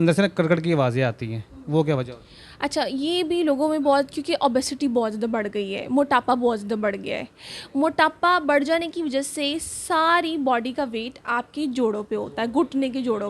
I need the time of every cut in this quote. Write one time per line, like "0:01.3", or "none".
none